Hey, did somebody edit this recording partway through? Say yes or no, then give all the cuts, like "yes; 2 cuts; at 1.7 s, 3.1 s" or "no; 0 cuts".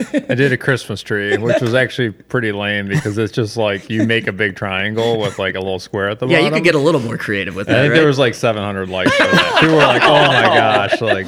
no; 0 cuts